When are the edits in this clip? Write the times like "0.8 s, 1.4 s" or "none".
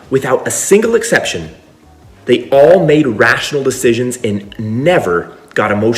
none